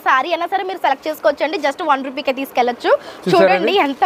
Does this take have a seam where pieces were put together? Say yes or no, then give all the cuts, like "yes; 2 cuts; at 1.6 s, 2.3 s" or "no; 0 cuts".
no; 0 cuts